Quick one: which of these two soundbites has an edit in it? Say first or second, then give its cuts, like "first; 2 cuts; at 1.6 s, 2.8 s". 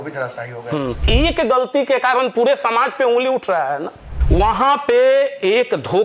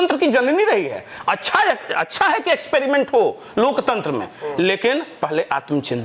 first; 2 cuts; at 1.0 s, 4.2 s